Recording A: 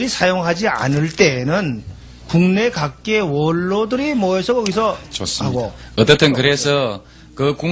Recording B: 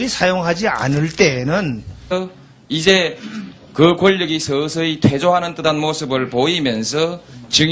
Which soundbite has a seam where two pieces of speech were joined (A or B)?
A